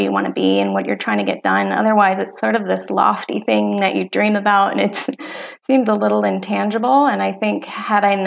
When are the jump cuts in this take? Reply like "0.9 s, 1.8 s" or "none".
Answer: none

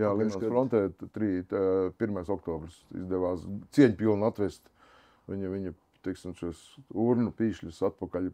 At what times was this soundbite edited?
2.8 s

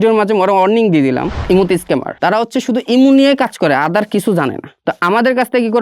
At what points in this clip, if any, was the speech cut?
1.4 s, 2.1 s, 4.7 s

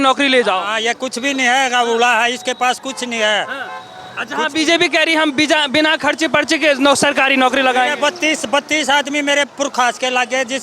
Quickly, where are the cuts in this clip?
none

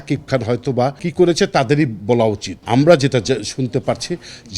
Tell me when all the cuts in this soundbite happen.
1.0 s, 2.5 s

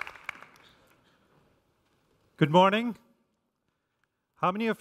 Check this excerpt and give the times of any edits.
none

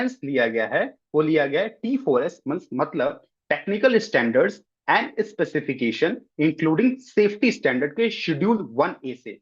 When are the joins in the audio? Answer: none

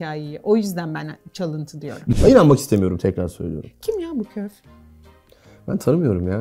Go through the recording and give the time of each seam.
2.2 s

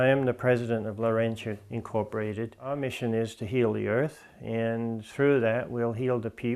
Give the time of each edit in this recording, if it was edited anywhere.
2.8 s

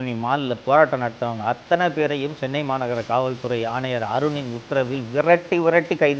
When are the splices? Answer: none

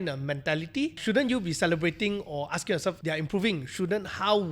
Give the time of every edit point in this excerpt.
1.0 s

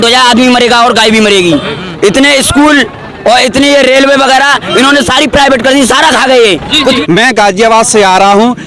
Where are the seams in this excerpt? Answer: 1.8 s, 7.0 s

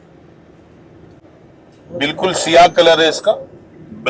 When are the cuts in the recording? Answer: 1.2 s

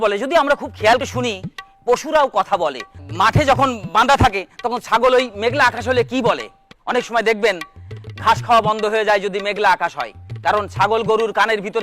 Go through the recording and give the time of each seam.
1.0 s

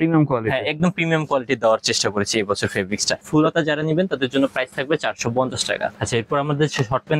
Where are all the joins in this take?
3.2 s, 5.9 s

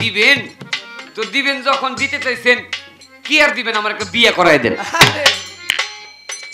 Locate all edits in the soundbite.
none

